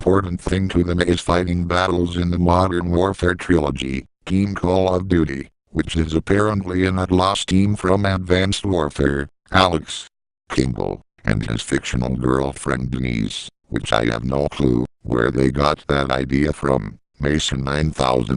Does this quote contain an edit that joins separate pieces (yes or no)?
yes